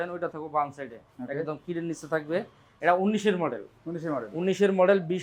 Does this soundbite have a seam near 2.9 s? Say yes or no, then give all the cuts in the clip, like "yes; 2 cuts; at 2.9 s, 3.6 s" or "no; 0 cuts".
no; 0 cuts